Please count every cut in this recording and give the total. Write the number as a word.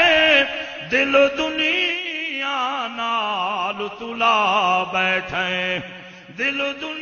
zero